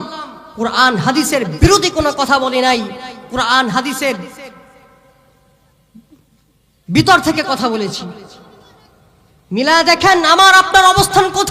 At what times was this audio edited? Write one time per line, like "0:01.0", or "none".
none